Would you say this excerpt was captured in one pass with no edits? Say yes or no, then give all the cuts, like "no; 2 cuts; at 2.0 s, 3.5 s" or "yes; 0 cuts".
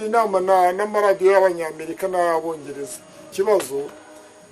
no; 1 cut; at 3.2 s